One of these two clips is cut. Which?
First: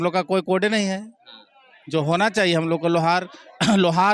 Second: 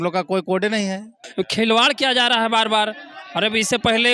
second; 1 cut; at 1.2 s

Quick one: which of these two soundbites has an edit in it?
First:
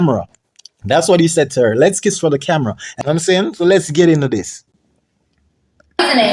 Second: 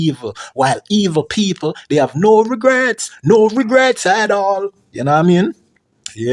first; 1 cut; at 2.8 s

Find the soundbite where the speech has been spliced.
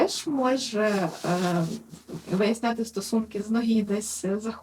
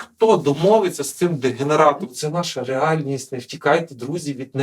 second; 1 cut; at 2.0 s

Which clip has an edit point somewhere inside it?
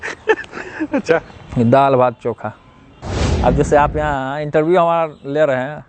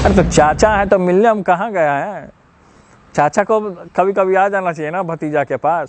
first; 1 cut; at 2.8 s

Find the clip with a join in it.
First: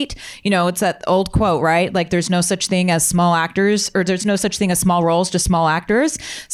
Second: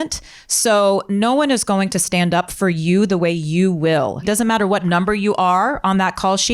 second; 1 cut; at 4.2 s

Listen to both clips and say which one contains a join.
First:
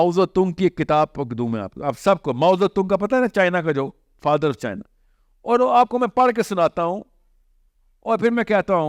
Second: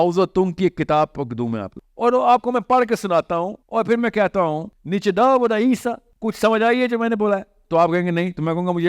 second; 4 cuts; at 1.7 s, 3.6 s, 4.7 s, 6.1 s

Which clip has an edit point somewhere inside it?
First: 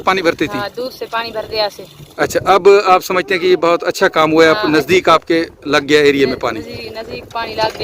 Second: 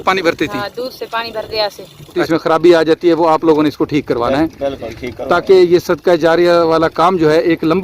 second; 1 cut; at 2.2 s

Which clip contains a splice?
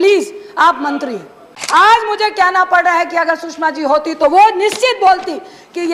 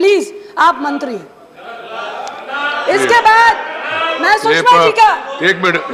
first; 1 cut; at 1.5 s

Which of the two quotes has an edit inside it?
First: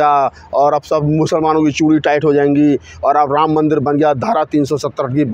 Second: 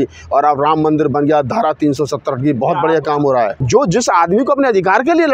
second; 1 cut; at 3.6 s

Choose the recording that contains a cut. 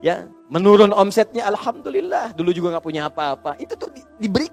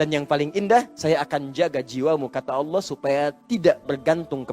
second; 1 cut; at 0.9 s

